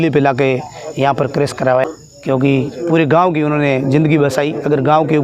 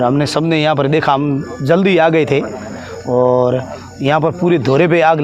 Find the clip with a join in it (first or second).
first